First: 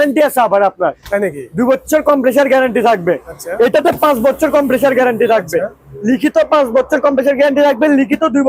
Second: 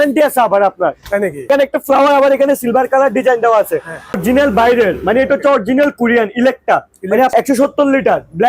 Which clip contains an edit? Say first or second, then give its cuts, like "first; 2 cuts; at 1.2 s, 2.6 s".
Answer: second; 3 cuts; at 1.5 s, 4.2 s, 7.3 s